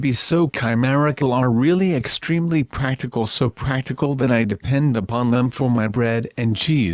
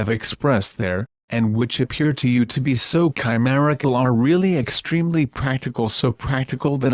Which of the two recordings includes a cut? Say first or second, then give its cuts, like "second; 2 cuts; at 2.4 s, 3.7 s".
second; 1 cut; at 1.1 s